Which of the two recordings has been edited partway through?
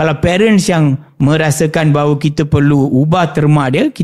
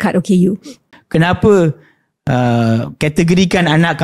second; 1 cut; at 1.0 s

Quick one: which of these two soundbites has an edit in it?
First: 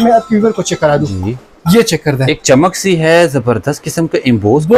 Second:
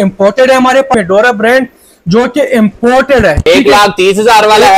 second; 2 cuts; at 0.9 s, 3.4 s

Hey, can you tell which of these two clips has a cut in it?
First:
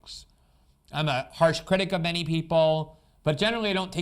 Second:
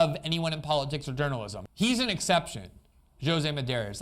second; 1 cut; at 1.6 s

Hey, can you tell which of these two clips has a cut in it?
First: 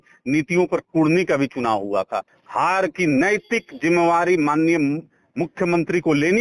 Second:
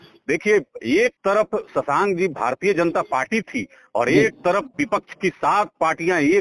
first; 1 cut; at 2.4 s

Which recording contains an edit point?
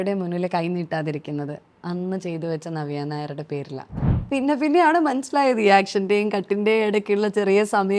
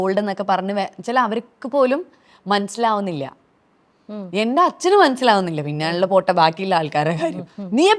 first; 1 cut; at 4.2 s

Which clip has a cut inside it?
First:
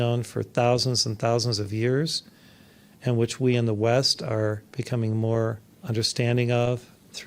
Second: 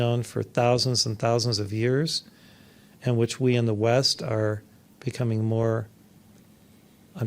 first; 2 cuts; at 4.7 s, 5.7 s

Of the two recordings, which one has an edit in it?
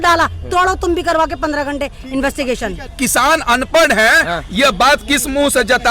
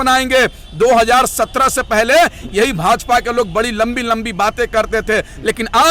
first; 1 cut; at 2.9 s

